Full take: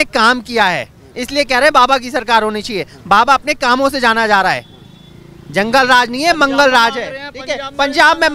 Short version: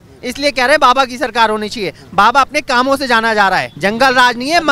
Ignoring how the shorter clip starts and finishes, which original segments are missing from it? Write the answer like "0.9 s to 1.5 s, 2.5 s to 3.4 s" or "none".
4.6 s to 5.4 s